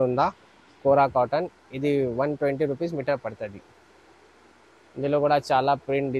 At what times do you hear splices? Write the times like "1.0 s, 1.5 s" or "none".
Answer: none